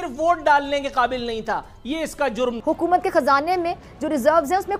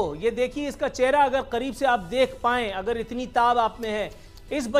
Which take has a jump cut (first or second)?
first